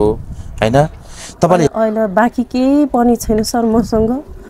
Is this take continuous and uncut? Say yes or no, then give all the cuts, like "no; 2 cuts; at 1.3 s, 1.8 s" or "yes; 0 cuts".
no; 1 cut; at 1.7 s